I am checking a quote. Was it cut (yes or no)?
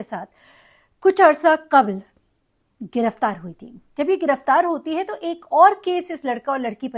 no